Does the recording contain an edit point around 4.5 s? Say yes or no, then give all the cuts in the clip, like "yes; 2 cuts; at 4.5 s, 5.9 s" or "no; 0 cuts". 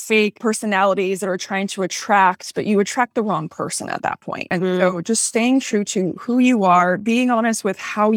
yes; 1 cut; at 4.5 s